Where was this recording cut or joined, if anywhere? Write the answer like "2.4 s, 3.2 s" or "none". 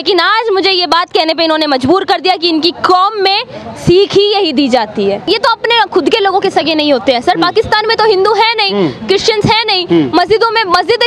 5.2 s